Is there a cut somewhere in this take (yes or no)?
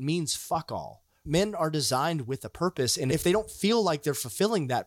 yes